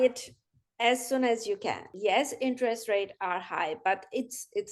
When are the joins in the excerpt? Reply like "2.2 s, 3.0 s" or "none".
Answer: 1.9 s